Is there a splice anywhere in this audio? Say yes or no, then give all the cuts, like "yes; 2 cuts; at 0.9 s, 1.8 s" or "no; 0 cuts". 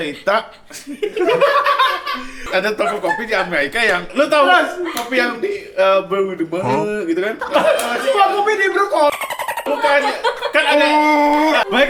yes; 1 cut; at 2.4 s